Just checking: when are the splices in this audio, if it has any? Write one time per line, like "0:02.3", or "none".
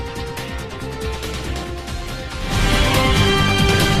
none